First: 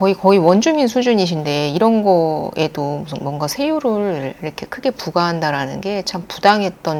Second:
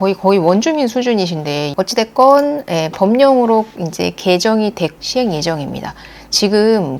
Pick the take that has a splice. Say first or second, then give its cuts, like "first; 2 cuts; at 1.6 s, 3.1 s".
second; 2 cuts; at 1.7 s, 5.0 s